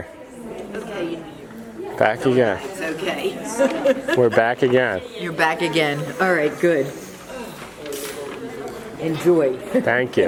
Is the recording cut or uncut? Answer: uncut